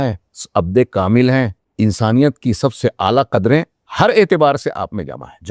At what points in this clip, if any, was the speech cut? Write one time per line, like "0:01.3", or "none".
0:01.6

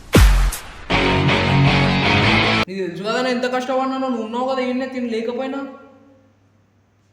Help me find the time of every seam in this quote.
0:02.7

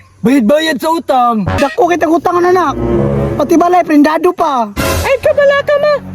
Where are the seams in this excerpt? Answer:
0:01.5

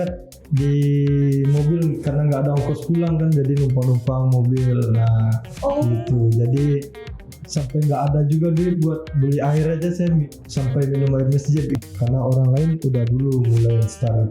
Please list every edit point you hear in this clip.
0:11.8

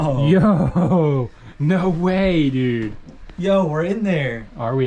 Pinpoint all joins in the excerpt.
none

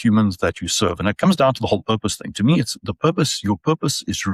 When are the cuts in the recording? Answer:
none

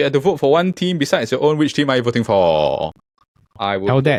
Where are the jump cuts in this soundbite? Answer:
none

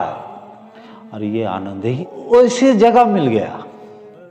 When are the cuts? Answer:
0:02.0

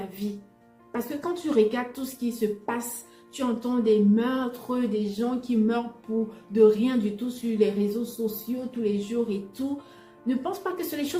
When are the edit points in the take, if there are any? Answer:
none

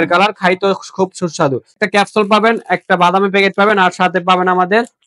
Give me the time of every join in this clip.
0:01.8

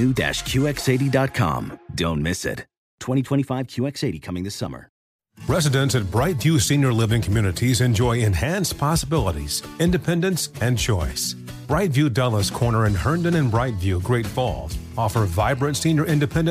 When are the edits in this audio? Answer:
0:05.1

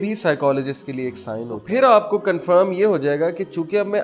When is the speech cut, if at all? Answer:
0:01.6

